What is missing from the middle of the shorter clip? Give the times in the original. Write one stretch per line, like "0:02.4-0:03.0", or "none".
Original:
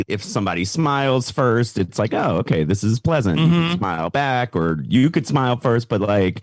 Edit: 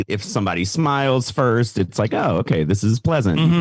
none